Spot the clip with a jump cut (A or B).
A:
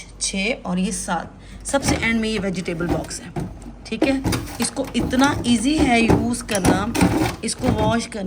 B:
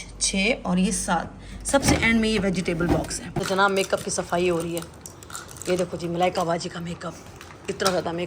B